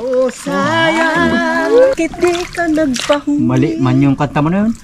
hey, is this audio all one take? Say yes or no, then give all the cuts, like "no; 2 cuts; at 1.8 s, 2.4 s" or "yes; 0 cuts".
no; 1 cut; at 1.9 s